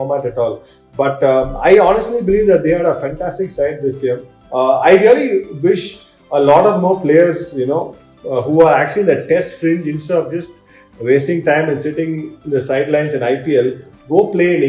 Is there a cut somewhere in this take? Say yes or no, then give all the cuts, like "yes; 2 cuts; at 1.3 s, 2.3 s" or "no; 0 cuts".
yes; 1 cut; at 4.3 s